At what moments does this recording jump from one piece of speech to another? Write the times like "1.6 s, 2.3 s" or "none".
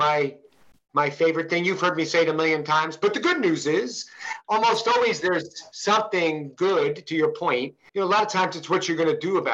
4.3 s, 7.8 s